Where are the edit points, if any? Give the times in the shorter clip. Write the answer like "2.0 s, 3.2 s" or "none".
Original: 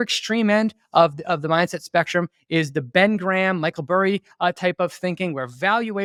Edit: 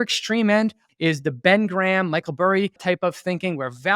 0.8 s, 2.8 s